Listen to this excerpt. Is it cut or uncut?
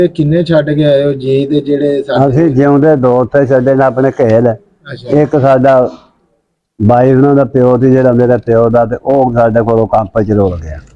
uncut